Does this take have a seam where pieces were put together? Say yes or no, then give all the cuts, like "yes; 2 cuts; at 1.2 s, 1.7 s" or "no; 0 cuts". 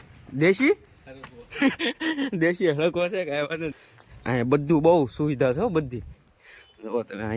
yes; 1 cut; at 3.7 s